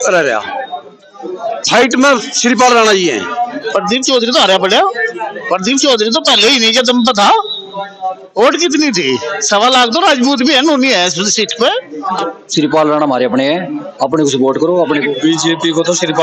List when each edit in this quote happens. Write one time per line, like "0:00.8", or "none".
0:03.6
0:12.2
0:15.1